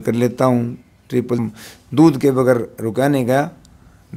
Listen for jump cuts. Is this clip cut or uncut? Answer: cut